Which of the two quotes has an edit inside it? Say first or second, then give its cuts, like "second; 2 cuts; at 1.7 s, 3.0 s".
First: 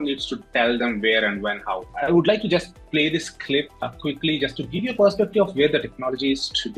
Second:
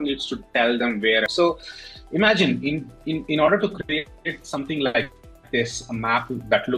second; 1 cut; at 1.3 s